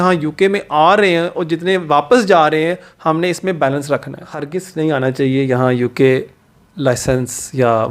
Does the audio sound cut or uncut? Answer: cut